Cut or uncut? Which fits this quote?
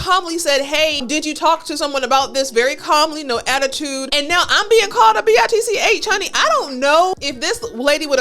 cut